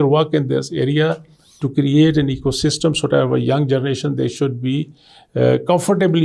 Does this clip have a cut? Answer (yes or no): no